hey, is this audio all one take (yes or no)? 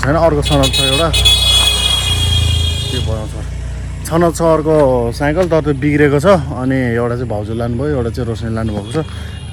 yes